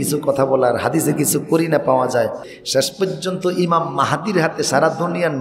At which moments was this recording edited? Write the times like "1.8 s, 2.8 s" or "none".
2.5 s